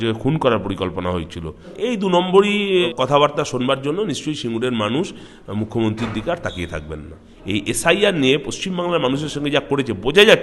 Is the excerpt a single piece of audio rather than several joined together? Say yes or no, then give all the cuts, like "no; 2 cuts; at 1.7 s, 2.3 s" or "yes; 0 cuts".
no; 3 cuts; at 1.7 s, 2.9 s, 7.3 s